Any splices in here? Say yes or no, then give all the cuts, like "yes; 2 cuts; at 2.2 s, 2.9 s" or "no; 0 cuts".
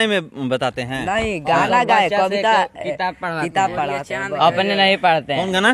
no; 0 cuts